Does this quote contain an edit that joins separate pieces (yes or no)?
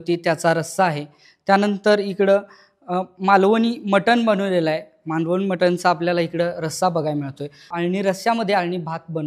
yes